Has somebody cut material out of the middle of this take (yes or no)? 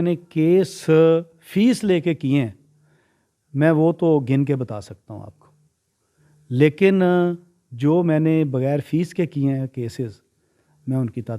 no